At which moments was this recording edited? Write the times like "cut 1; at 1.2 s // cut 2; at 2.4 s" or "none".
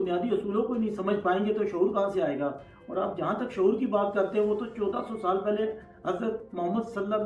none